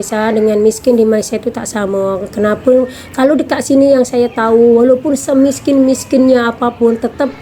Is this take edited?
no; 0 cuts

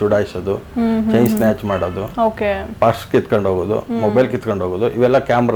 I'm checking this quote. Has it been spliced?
no; 0 cuts

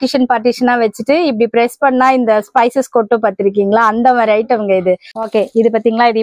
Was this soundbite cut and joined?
yes; 1 cut; at 5.2 s

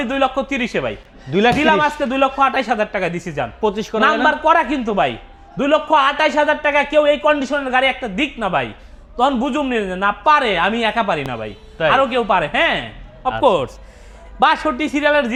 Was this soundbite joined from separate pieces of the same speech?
no; 0 cuts

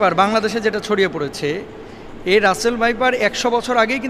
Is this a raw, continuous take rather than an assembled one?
yes; 0 cuts

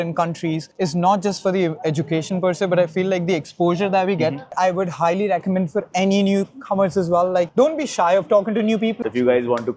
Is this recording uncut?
no; 2 cuts; at 4.5 s, 9.0 s

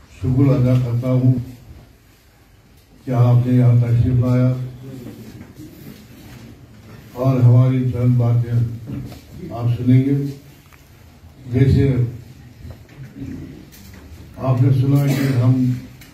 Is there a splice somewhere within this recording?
yes; 1 cut; at 1.4 s

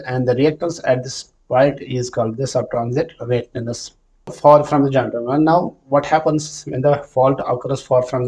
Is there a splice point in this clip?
yes; 1 cut; at 4.3 s

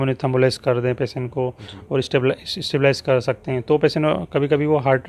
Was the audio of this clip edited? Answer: no; 0 cuts

